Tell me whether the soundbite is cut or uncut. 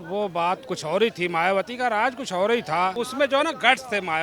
cut